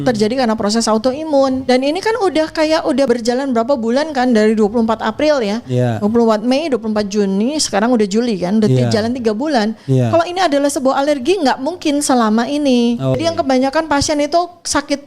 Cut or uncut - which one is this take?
cut